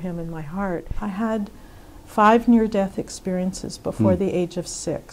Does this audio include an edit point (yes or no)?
yes